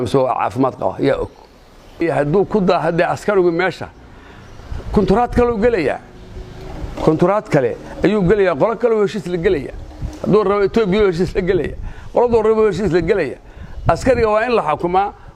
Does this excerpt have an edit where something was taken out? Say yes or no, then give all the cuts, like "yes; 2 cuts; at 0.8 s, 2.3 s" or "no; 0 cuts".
yes; 1 cut; at 2.0 s